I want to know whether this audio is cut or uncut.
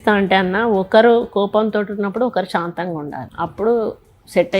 cut